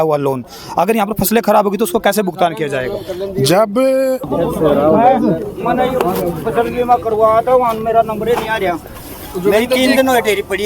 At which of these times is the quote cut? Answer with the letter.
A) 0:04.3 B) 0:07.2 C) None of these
A